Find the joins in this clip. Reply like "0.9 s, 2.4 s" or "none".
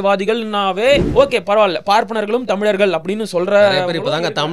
1.1 s